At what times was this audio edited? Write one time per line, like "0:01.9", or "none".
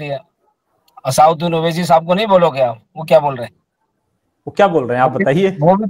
none